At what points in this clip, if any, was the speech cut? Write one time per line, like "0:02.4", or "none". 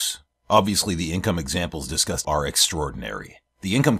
0:02.2